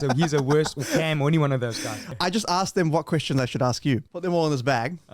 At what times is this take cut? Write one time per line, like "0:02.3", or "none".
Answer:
0:02.1
0:04.1